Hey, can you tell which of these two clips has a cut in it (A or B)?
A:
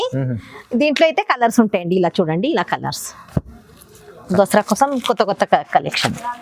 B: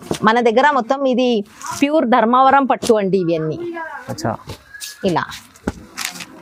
A